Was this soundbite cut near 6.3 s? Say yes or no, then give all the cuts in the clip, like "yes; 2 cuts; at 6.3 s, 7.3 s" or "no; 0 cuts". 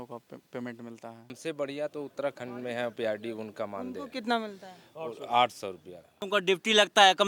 yes; 2 cuts; at 1.4 s, 6.3 s